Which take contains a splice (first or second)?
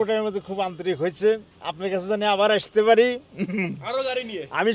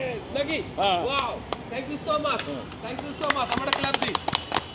first